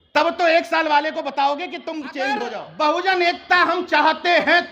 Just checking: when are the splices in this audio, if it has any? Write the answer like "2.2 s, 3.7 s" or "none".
2.6 s